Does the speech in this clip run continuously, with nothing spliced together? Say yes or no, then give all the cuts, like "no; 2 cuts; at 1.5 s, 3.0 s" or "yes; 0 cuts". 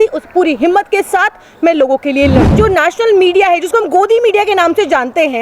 no; 1 cut; at 2.5 s